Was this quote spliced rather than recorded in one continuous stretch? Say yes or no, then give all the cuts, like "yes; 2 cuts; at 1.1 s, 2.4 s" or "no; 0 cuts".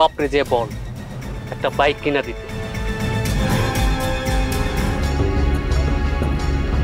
yes; 1 cut; at 4.8 s